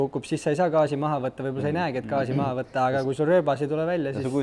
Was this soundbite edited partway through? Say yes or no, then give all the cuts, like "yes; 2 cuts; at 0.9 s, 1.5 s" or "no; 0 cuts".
no; 0 cuts